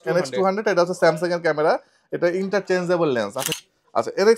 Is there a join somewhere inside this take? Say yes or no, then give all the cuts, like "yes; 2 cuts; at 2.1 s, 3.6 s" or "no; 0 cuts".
yes; 1 cut; at 3.5 s